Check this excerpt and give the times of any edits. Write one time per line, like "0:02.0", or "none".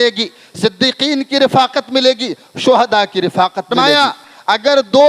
0:03.7